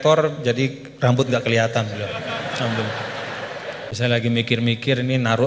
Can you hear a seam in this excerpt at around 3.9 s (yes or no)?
yes